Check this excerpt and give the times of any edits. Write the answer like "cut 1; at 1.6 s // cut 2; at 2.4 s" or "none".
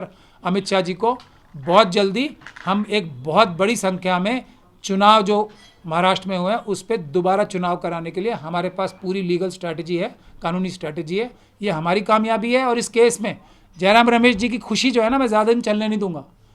none